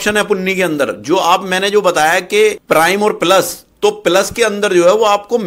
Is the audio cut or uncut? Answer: uncut